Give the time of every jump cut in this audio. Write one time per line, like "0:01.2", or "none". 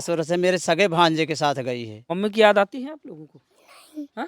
0:02.0